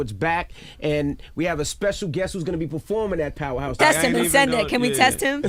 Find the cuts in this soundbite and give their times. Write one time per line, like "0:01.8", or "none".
none